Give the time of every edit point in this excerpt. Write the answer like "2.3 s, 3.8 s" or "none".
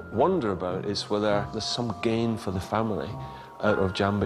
1.6 s